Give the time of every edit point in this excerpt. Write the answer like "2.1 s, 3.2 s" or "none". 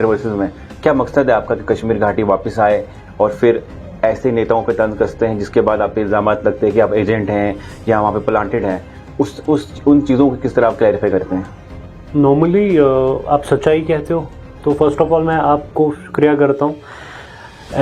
none

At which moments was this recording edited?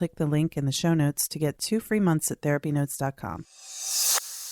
3.6 s

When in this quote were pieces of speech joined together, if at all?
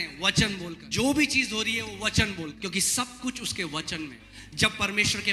0.8 s, 2.5 s, 4.2 s

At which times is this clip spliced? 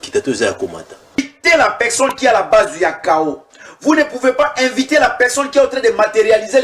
1.2 s

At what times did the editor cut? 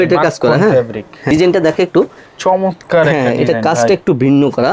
1.2 s

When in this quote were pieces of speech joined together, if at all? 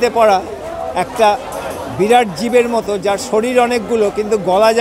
none

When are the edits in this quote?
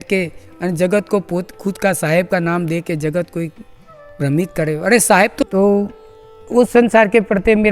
5.4 s

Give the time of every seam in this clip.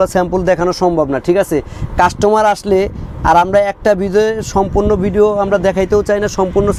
none

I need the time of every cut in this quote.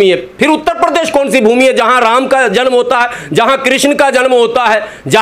none

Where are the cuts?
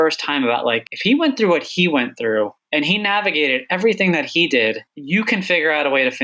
0.9 s, 2.6 s, 4.9 s

